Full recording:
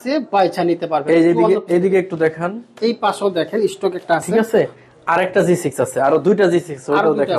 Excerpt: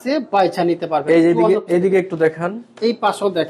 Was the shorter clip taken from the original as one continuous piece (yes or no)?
yes